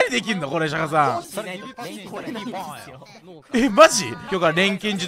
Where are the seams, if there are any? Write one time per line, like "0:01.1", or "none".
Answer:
0:01.2
0:04.2